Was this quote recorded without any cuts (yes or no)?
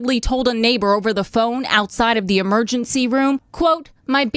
yes